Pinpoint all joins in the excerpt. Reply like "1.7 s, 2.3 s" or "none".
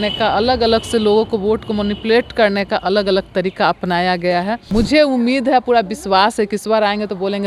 4.6 s